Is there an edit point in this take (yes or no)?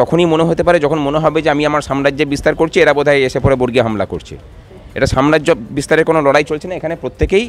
no